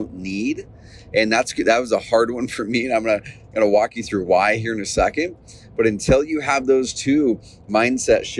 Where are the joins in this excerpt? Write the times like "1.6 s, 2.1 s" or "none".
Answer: none